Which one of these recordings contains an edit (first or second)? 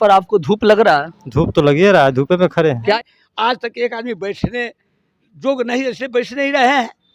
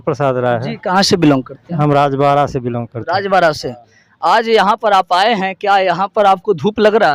first